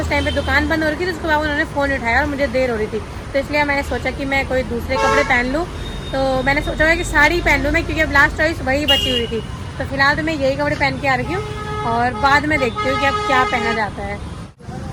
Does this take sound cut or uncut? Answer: uncut